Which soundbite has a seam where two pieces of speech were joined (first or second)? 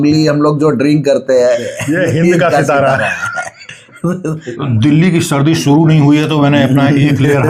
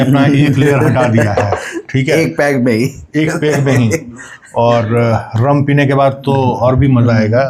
first